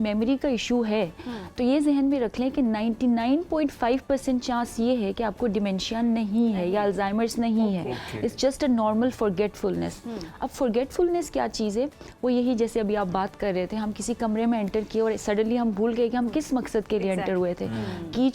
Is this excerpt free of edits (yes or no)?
yes